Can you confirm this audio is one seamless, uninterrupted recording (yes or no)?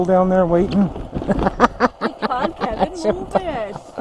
yes